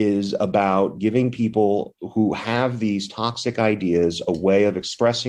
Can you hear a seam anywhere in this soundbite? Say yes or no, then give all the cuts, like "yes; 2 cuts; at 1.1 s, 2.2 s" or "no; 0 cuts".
no; 0 cuts